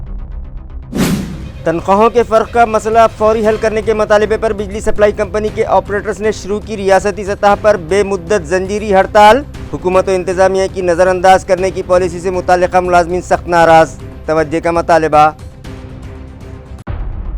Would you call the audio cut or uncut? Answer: cut